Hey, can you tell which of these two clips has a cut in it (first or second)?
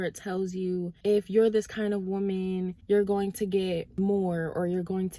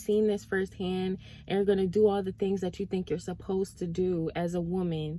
first